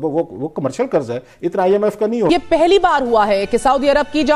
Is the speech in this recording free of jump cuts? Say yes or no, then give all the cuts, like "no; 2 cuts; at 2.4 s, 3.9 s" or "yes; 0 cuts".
no; 1 cut; at 2.3 s